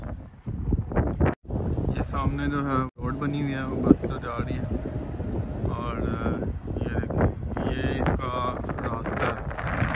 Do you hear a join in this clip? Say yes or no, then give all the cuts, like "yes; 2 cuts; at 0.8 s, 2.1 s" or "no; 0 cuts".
yes; 2 cuts; at 1.3 s, 3.0 s